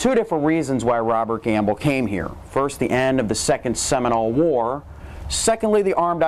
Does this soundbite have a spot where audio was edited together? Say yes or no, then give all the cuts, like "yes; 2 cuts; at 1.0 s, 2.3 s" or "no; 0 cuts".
yes; 1 cut; at 3.0 s